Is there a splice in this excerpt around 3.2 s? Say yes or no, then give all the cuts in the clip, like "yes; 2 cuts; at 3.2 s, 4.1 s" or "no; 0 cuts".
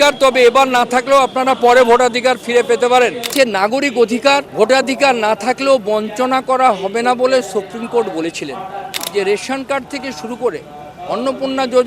yes; 3 cuts; at 3.2 s, 4.5 s, 9.0 s